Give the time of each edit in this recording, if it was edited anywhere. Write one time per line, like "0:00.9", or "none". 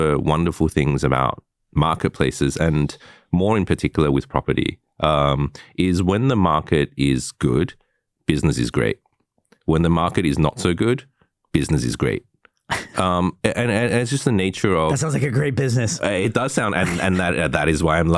none